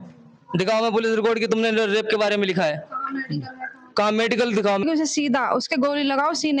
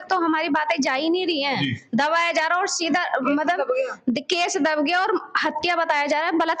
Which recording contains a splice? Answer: first; 1 cut; at 4.8 s

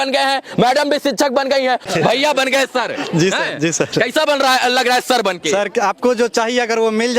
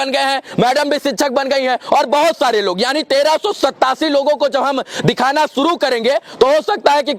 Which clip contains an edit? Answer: first; 1 cut; at 1.8 s

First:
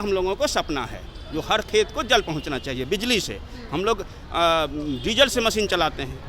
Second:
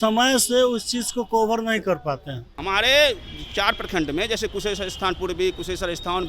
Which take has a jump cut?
second; 1 cut; at 2.6 s

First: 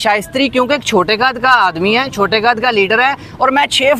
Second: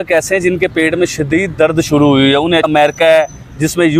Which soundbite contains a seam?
second; 1 cut; at 2.7 s

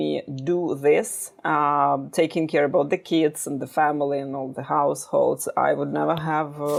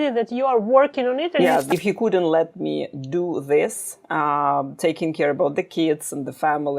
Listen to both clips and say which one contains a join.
second; 1 cut; at 1.7 s

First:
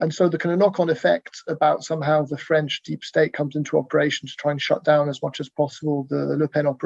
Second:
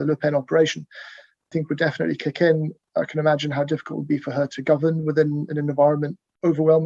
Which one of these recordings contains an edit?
second; 1 cut; at 1.5 s

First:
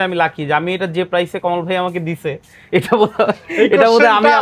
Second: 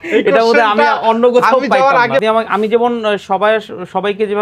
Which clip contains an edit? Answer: second; 1 cut; at 2.2 s

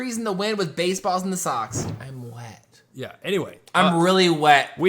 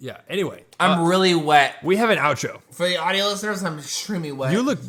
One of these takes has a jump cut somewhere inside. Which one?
first; 1 cut; at 1.9 s

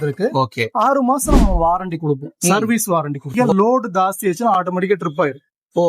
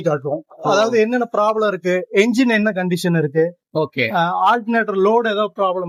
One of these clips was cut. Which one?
first; 1 cut; at 3.3 s

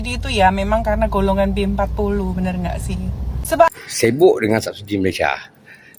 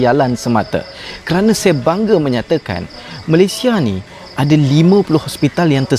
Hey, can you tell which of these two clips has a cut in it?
first; 1 cut; at 3.7 s

